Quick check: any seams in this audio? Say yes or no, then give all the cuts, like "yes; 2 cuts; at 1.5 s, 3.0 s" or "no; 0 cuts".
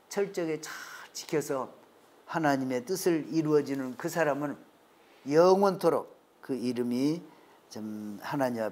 no; 0 cuts